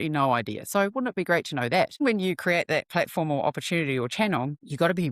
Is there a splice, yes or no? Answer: yes